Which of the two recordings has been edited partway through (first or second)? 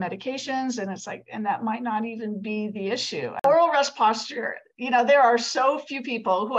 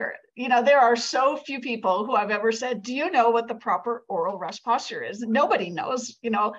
first